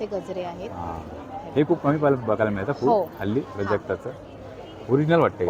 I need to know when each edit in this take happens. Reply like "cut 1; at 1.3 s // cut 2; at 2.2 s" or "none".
none